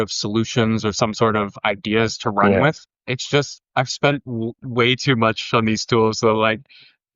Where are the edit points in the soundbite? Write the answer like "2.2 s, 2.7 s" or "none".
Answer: 3.6 s

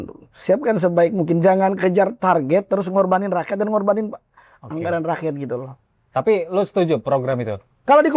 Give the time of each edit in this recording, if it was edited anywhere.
none

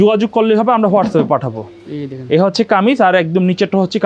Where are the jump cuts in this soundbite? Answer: none

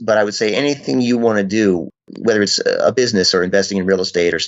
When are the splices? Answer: 2.1 s

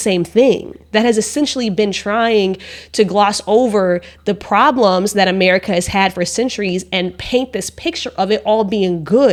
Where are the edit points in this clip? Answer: none

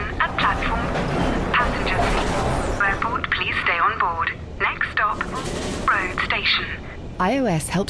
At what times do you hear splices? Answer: none

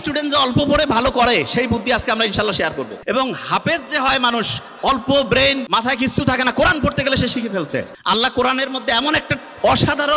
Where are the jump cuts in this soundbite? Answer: 3.0 s, 5.6 s, 7.9 s

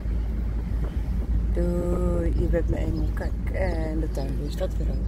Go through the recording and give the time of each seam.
none

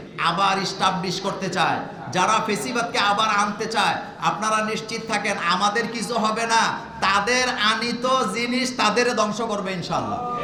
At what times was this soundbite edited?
none

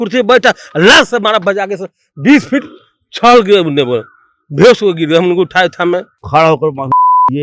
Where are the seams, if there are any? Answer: 6.1 s

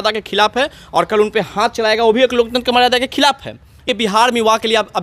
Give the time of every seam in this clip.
3.8 s

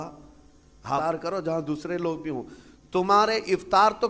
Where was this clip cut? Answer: 1.0 s

